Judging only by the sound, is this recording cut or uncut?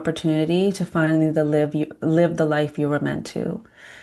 uncut